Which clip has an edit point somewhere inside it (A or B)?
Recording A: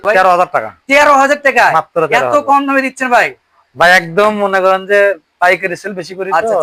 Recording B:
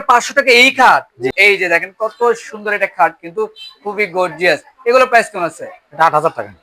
B